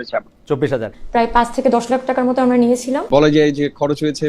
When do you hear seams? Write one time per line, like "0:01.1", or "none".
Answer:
0:01.0
0:03.0

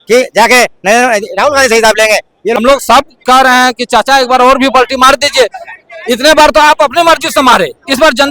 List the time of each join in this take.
0:02.6

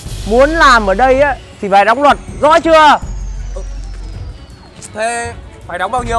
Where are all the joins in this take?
none

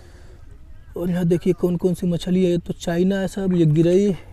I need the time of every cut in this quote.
none

